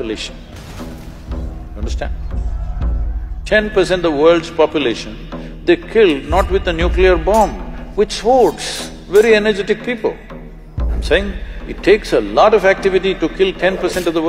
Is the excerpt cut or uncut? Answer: uncut